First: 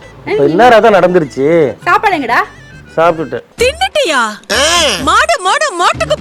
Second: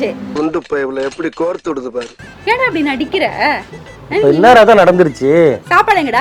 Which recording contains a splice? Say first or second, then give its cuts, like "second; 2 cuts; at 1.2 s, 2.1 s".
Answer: second; 1 cut; at 2.1 s